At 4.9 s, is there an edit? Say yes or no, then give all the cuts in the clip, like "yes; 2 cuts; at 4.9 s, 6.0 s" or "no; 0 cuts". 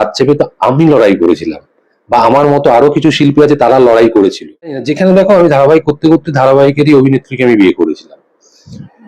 yes; 1 cut; at 4.9 s